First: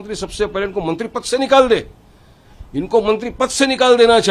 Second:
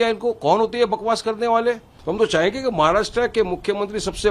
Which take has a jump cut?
second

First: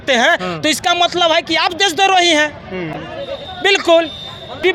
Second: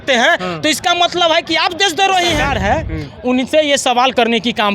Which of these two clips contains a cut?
second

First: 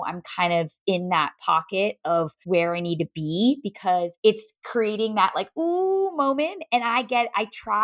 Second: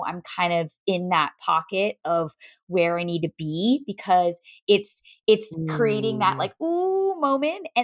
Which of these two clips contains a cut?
first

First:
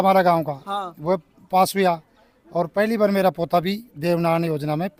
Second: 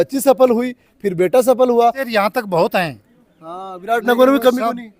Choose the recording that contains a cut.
second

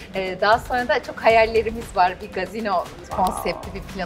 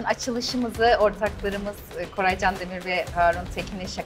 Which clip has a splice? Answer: first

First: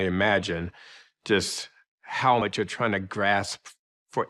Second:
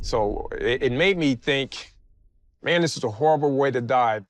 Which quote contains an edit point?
first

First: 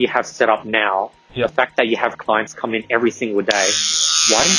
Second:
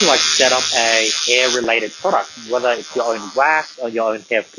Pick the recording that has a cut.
second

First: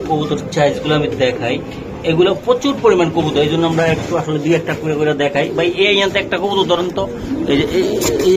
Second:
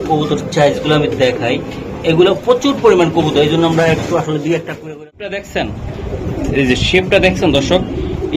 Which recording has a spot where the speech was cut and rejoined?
second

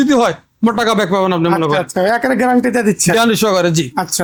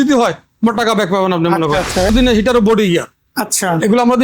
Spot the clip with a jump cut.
second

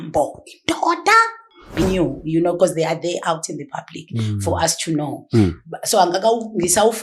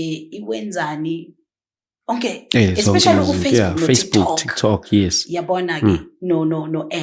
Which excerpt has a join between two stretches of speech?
first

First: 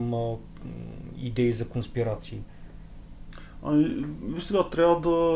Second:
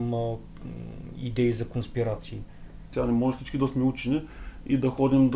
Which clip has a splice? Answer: second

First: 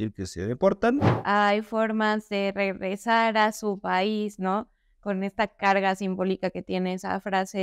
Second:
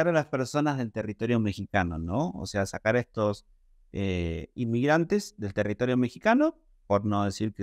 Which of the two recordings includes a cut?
first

